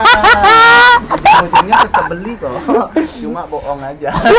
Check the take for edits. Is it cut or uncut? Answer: uncut